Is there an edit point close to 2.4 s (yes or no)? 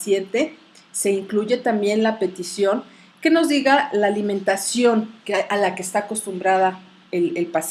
yes